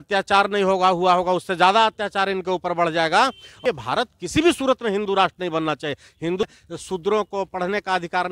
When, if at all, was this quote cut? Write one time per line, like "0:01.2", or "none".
0:03.5
0:06.4